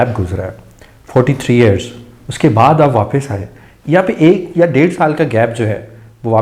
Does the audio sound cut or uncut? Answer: uncut